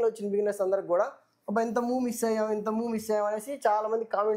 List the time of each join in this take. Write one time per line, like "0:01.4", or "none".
none